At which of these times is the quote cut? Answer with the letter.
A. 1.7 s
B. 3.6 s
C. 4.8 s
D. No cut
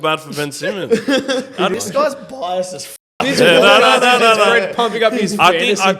A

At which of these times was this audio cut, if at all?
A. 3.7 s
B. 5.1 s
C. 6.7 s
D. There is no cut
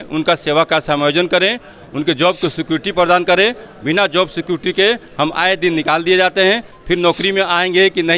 D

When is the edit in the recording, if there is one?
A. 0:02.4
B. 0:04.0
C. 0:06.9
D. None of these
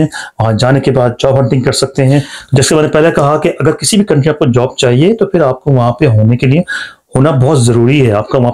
A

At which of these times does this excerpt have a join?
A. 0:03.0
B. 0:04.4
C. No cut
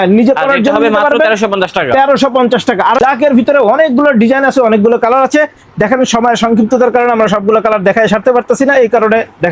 A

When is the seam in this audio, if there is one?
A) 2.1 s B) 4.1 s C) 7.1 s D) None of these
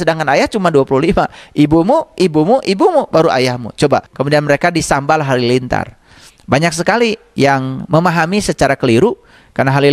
B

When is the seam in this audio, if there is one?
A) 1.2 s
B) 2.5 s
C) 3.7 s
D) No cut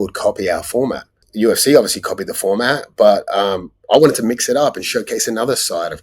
A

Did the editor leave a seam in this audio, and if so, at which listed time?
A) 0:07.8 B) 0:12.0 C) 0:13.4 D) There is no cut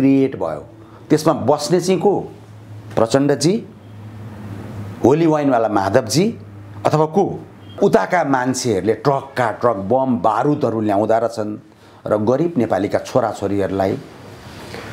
A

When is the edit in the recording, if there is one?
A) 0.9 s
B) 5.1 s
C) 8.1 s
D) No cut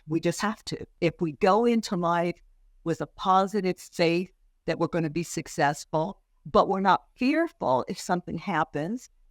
A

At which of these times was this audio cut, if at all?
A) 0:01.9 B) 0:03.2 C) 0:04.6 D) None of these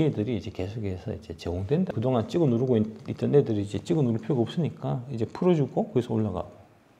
A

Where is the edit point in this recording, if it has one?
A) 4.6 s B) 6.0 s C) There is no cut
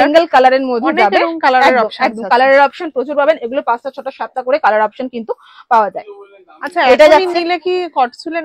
C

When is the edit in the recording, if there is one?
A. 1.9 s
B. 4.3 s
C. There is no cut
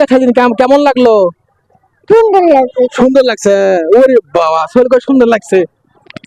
C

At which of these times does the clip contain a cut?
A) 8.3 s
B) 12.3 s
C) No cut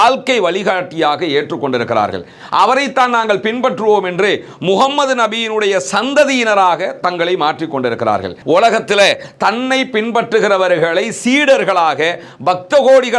A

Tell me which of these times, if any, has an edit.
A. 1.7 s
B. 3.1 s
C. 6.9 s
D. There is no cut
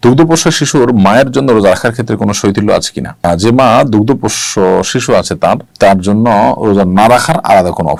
D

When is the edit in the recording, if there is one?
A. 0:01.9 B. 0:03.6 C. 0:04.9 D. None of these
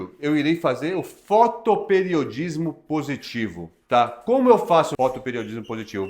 C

